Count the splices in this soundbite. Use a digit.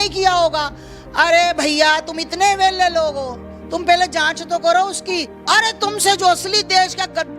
1